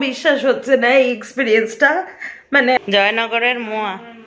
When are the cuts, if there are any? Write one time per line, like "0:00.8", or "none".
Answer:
0:02.8